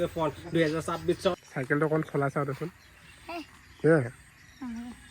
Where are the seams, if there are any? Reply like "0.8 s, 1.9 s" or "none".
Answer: 1.3 s